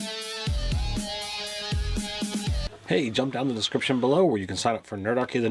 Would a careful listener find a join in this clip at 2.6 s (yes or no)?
yes